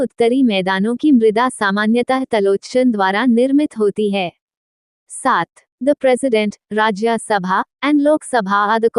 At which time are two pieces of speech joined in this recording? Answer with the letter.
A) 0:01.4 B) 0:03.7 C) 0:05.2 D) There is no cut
C